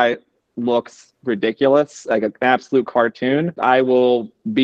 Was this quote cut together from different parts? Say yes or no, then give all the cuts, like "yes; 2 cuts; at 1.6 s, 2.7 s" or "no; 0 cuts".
yes; 1 cut; at 3.5 s